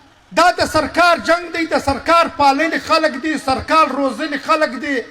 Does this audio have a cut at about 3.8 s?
yes; 1 cut; at 3.8 s

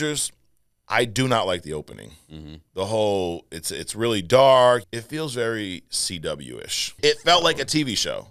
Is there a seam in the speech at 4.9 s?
yes; 2 cuts; at 4.9 s, 6.9 s

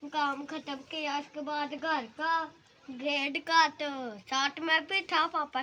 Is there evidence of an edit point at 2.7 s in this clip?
no; 0 cuts

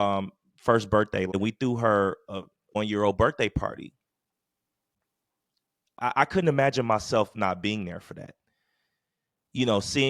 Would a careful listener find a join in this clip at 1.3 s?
yes; 1 cut; at 1.3 s

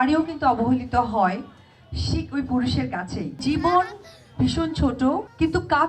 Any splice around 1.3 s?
no; 1 cut; at 3.4 s

